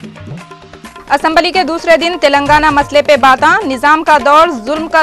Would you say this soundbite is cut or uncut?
cut